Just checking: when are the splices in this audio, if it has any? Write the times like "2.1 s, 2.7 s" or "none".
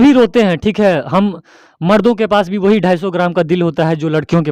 none